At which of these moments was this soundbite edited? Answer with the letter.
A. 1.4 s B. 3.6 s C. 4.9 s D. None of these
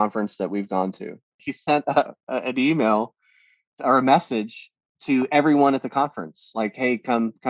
A